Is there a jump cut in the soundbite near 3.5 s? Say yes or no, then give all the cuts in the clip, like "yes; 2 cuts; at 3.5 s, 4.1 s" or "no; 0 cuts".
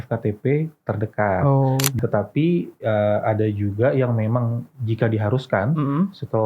no; 1 cut; at 2.0 s